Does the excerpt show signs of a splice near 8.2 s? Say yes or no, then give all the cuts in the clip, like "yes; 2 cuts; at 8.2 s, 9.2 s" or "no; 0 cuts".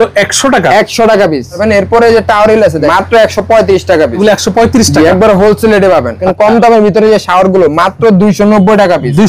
no; 4 cuts; at 1.6 s, 2.9 s, 4.2 s, 6.3 s